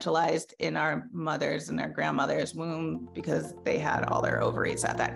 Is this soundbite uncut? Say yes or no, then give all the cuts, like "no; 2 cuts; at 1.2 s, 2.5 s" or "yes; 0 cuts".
yes; 0 cuts